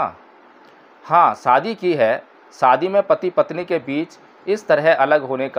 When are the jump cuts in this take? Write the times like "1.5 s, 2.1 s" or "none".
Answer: none